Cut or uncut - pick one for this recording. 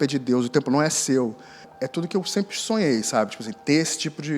cut